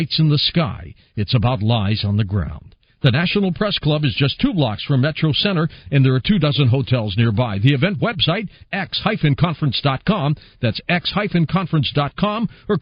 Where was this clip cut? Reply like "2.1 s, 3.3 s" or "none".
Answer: none